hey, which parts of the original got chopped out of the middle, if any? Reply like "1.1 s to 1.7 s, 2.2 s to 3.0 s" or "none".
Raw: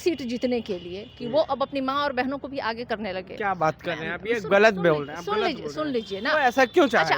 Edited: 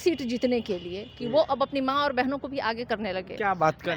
none